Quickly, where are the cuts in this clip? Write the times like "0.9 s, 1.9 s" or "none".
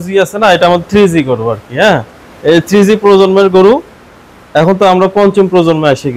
none